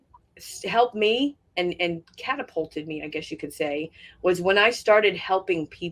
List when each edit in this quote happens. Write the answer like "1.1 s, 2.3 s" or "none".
none

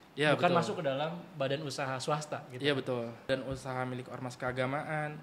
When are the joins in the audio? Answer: 3.3 s

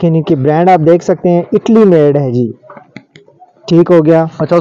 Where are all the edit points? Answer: none

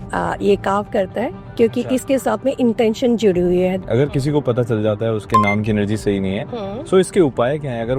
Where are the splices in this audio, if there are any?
3.8 s

